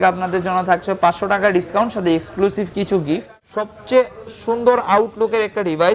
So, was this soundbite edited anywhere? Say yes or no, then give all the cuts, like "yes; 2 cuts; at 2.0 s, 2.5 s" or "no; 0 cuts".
yes; 1 cut; at 3.3 s